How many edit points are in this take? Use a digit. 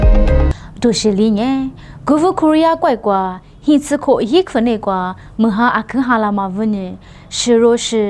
0